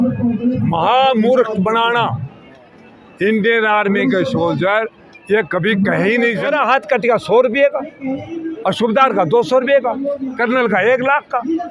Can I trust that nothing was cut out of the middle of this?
no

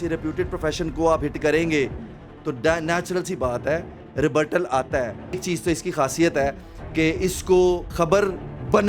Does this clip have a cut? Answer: yes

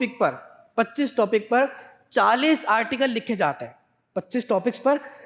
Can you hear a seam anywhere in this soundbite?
no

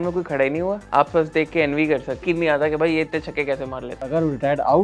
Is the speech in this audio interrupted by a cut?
yes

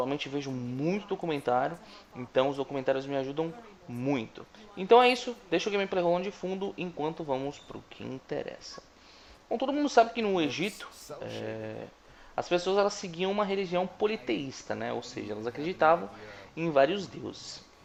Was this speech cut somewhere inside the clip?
no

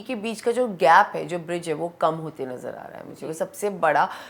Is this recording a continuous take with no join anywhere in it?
yes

